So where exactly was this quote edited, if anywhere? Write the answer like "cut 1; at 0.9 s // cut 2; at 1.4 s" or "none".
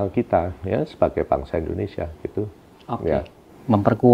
none